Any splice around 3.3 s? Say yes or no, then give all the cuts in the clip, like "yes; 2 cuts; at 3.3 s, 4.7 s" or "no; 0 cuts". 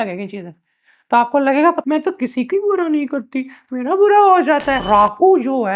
no; 2 cuts; at 1.8 s, 4.9 s